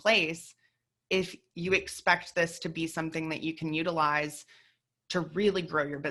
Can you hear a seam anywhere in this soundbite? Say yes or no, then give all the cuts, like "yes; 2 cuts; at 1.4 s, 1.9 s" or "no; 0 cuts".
no; 0 cuts